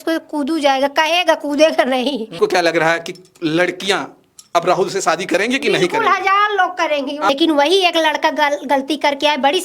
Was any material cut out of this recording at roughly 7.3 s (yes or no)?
yes